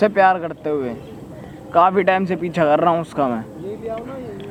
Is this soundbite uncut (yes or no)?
yes